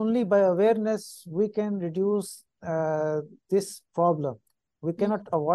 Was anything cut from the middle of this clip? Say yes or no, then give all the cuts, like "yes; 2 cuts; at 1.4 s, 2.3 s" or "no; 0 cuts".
no; 0 cuts